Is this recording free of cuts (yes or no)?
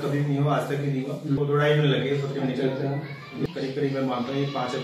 no